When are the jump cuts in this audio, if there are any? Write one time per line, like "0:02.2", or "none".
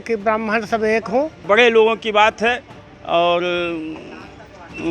0:01.4